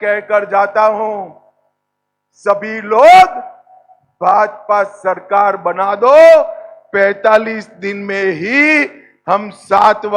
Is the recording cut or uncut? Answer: uncut